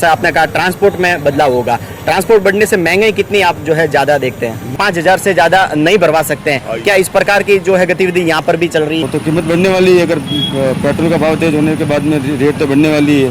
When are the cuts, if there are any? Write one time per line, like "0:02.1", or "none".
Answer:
0:04.7
0:09.0